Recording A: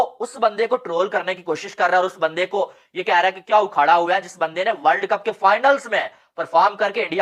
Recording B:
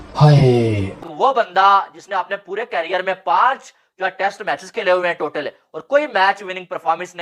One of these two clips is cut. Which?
B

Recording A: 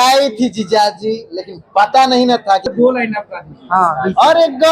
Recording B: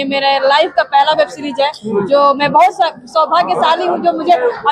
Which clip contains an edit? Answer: A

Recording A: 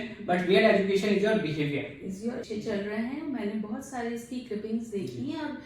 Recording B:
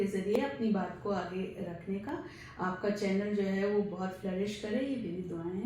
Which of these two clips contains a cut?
A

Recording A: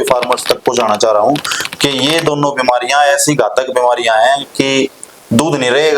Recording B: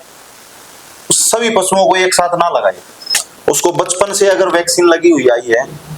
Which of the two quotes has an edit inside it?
B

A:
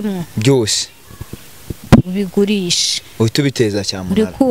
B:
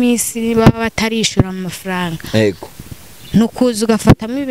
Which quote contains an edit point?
A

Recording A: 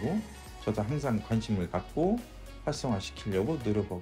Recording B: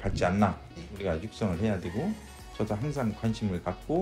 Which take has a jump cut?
B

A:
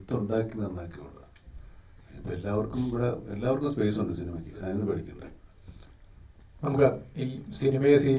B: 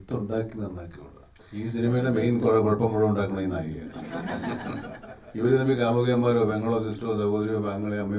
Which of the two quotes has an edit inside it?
B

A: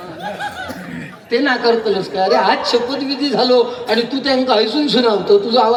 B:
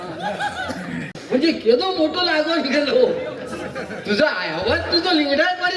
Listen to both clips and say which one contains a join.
B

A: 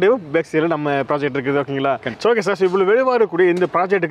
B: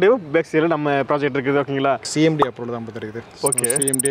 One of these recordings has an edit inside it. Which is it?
B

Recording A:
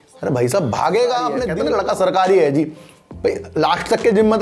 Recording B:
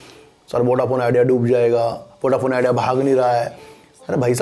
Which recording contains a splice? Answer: A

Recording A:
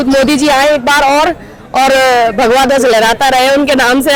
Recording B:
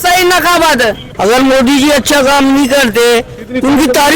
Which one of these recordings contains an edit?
B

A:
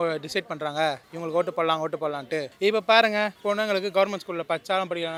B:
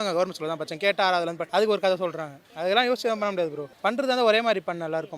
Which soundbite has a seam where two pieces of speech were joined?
B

